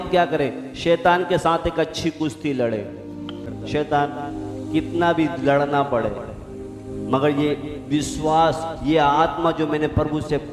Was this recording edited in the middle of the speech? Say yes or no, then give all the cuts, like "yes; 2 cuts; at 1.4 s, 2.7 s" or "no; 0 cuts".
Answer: yes; 1 cut; at 3.5 s